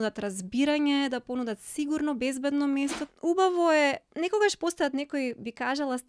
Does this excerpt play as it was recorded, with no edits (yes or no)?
no